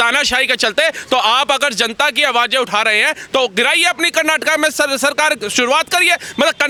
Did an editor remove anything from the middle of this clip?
no; 0 cuts

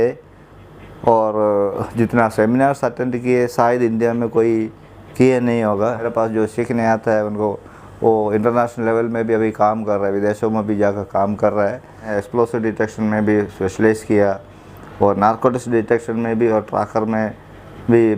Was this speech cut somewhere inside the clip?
yes; 2 cuts; at 6.1 s, 12.2 s

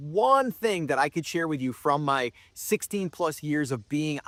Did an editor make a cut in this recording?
no; 0 cuts

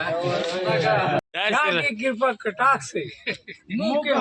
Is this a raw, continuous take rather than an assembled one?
no; 1 cut; at 1.3 s

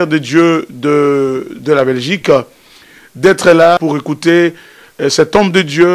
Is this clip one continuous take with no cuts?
no; 1 cut; at 3.8 s

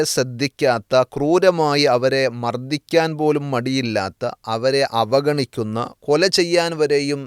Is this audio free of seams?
yes; 0 cuts

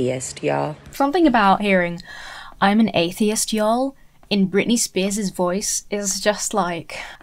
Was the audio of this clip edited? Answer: yes; 1 cut; at 0.9 s

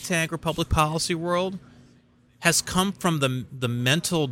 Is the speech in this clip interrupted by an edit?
no; 0 cuts

